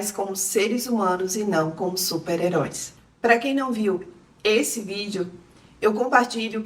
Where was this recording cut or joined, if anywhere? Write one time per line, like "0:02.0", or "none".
none

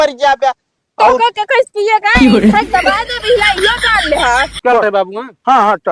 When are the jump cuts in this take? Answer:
0:04.5

